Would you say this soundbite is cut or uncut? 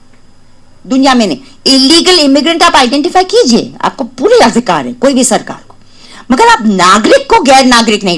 uncut